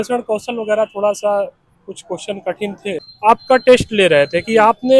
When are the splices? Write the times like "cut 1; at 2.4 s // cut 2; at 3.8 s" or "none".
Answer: cut 1; at 3.1 s